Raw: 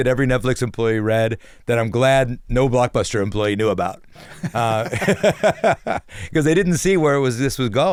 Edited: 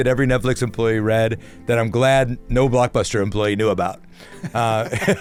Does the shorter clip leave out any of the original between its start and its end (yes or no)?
no